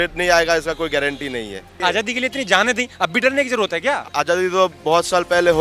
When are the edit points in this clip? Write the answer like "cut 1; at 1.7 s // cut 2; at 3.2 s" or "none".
cut 1; at 1.7 s // cut 2; at 4.1 s